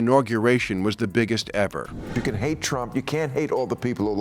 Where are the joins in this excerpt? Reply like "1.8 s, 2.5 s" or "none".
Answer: 1.9 s